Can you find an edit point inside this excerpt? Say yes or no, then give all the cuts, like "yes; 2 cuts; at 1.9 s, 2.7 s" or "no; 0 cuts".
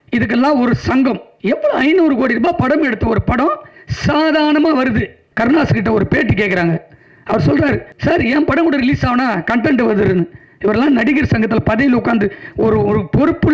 yes; 3 cuts; at 1.3 s, 5.2 s, 7.9 s